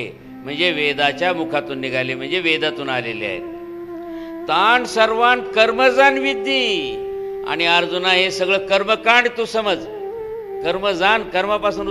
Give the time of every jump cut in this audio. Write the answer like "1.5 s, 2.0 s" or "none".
none